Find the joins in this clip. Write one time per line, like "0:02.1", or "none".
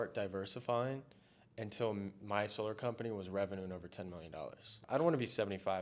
0:02.2
0:04.8